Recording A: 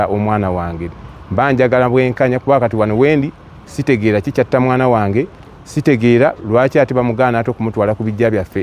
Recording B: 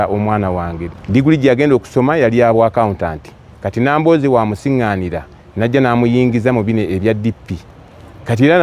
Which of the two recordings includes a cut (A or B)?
B